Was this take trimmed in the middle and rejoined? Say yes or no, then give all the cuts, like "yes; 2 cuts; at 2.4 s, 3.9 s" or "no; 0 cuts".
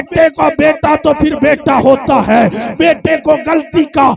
no; 0 cuts